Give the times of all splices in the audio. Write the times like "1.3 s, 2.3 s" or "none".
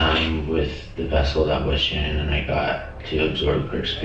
none